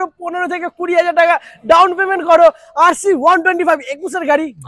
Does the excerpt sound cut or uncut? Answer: uncut